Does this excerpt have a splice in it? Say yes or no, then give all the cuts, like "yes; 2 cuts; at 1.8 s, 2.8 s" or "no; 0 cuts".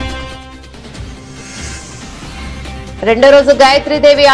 yes; 2 cuts; at 1.0 s, 2.6 s